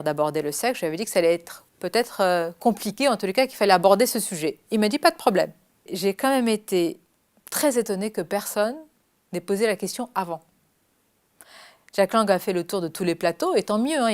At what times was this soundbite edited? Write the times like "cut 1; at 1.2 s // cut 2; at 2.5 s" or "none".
cut 1; at 5.9 s